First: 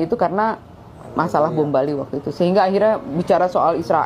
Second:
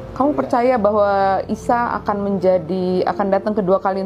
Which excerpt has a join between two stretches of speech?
first; 1 cut; at 2.5 s

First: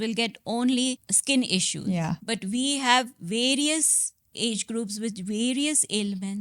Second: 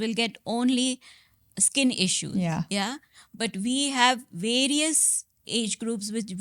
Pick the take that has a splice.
first; 2 cuts; at 1.1 s, 2.2 s

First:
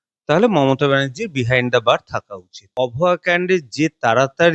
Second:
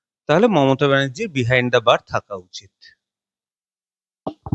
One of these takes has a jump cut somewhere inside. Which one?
first; 1 cut; at 2.6 s

